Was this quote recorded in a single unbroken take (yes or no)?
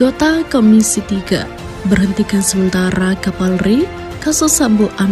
yes